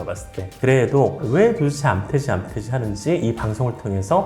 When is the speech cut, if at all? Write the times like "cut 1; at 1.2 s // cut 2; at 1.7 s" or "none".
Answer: cut 1; at 1.2 s